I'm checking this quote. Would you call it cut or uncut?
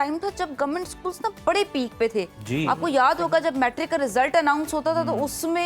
uncut